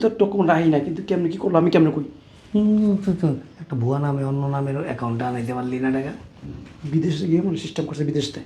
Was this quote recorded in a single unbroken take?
yes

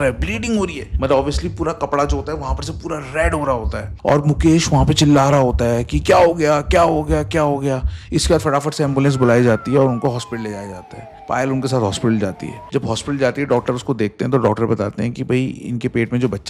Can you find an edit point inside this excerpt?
no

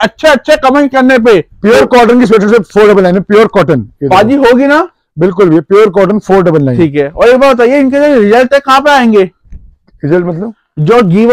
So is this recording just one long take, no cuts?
yes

